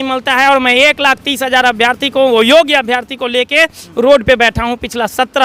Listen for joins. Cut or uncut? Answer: uncut